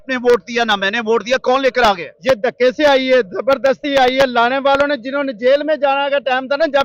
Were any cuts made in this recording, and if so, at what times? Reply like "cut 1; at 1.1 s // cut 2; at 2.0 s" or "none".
none